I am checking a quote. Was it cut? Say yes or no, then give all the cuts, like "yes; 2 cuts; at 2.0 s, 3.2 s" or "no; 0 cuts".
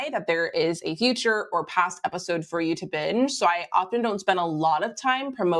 no; 0 cuts